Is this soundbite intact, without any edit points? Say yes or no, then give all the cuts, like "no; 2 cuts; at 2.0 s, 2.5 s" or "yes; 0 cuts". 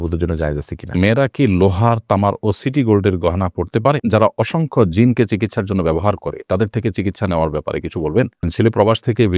no; 3 cuts; at 0.9 s, 4.0 s, 8.5 s